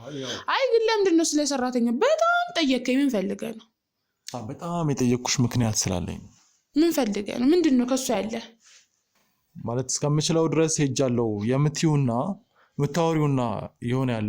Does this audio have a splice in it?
yes; 1 cut; at 9.1 s

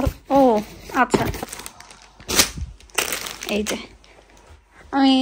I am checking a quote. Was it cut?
yes; 1 cut; at 1.4 s

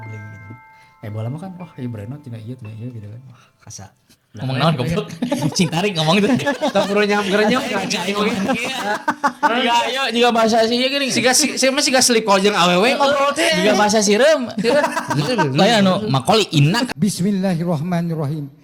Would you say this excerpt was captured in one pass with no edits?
yes; 0 cuts

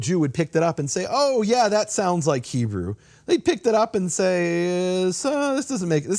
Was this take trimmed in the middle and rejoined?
no; 0 cuts

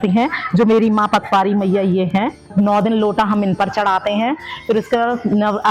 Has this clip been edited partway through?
no; 0 cuts

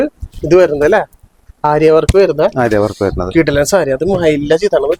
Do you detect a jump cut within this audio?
no; 0 cuts

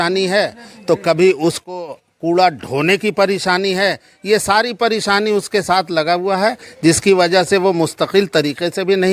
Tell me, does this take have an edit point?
no; 0 cuts

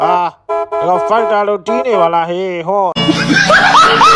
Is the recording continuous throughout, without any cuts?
no; 1 cut; at 2.9 s

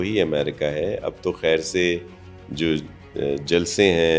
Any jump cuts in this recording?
no; 0 cuts

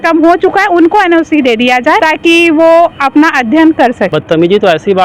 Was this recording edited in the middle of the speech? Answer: yes; 2 cuts; at 2.0 s, 4.1 s

